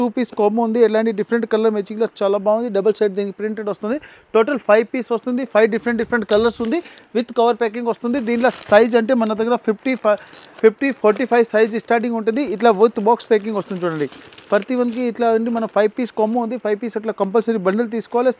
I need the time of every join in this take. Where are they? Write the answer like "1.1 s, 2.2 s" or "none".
none